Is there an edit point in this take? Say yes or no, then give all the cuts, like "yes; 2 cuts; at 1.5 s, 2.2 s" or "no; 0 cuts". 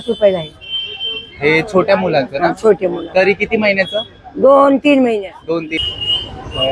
yes; 1 cut; at 5.8 s